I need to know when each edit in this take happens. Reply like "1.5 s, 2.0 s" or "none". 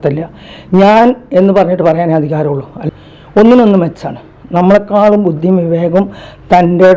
2.9 s